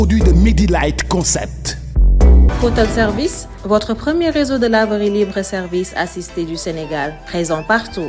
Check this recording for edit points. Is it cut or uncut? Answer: cut